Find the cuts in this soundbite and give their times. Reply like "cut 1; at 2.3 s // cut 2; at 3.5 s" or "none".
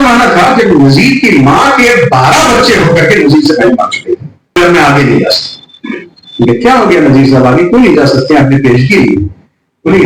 cut 1; at 4.6 s